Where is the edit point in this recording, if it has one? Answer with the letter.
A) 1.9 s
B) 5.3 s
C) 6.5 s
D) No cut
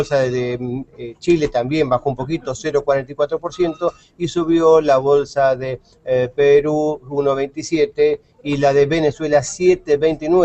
C